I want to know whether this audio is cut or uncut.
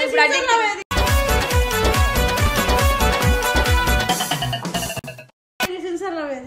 uncut